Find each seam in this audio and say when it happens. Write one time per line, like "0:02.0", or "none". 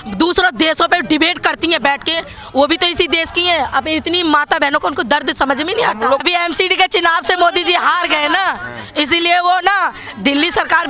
0:06.2